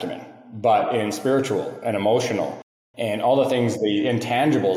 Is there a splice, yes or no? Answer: no